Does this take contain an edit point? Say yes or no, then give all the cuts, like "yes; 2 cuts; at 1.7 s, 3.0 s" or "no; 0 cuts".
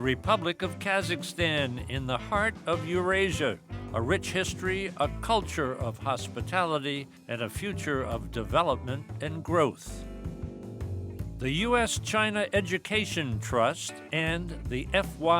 yes; 2 cuts; at 10.1 s, 11.4 s